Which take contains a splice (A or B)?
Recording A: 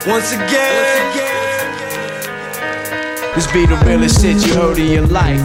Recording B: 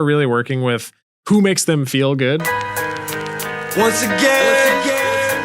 B